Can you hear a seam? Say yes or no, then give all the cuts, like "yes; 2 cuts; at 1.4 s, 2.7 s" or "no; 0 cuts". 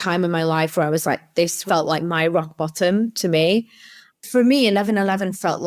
yes; 2 cuts; at 1.6 s, 3.8 s